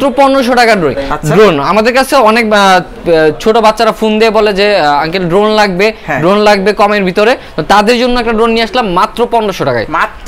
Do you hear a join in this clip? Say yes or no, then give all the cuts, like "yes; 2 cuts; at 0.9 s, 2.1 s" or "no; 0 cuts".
no; 0 cuts